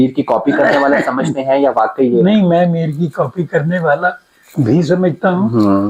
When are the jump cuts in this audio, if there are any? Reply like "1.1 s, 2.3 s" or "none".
none